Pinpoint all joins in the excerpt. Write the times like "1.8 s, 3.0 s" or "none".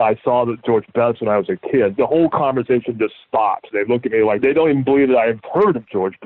1.9 s, 4.4 s